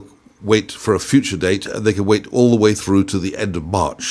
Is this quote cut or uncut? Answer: uncut